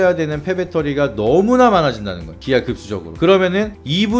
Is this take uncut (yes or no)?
yes